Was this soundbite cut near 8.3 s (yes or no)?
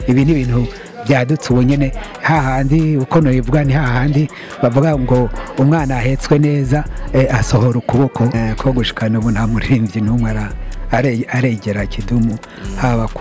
yes